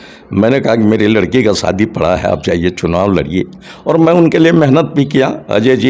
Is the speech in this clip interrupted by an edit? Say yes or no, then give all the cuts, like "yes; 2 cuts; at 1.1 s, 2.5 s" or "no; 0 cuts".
no; 0 cuts